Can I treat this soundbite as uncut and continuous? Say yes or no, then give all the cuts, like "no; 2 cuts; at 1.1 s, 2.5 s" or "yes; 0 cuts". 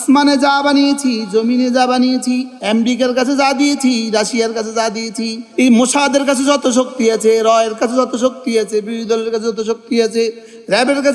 yes; 0 cuts